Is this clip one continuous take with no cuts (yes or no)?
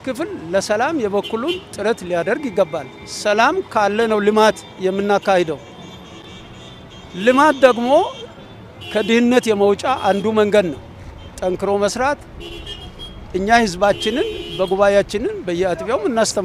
yes